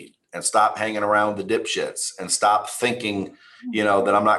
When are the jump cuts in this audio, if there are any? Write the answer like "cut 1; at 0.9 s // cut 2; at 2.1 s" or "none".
none

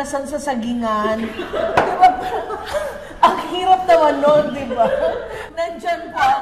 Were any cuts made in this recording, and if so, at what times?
none

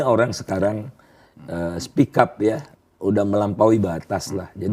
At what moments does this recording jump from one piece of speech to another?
cut 1; at 2.7 s

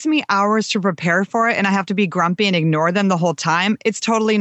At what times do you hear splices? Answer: none

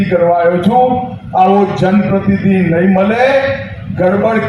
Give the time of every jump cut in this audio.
none

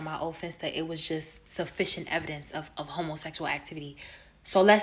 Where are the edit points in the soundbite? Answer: cut 1; at 3.5 s

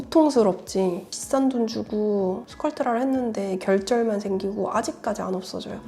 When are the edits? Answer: cut 1; at 1.0 s

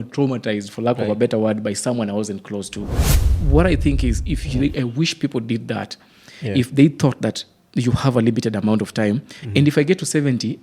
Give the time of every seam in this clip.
cut 1; at 3.2 s

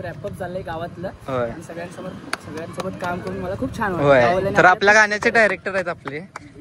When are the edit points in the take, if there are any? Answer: none

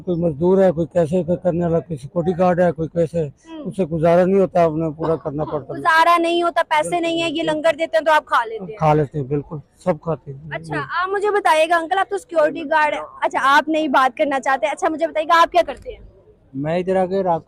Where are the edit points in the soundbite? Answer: none

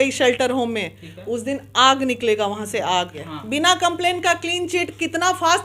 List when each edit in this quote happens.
cut 1; at 3.2 s

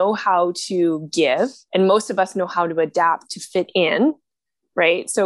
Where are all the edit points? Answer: cut 1; at 1.6 s

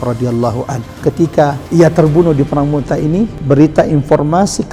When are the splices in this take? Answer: cut 1; at 1.6 s // cut 2; at 3.4 s

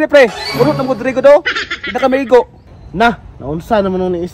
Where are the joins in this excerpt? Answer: none

